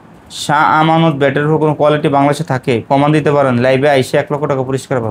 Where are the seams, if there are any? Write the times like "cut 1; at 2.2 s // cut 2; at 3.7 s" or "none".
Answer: none